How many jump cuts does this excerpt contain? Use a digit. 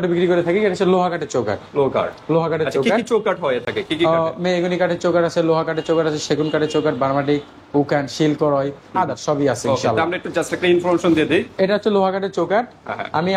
0